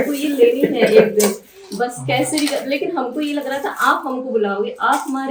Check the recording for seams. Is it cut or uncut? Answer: uncut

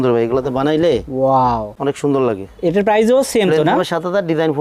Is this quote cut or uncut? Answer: uncut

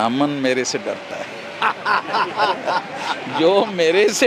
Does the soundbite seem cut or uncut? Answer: uncut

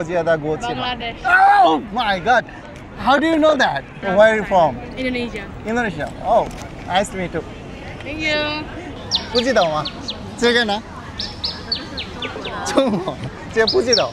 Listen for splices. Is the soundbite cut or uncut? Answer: cut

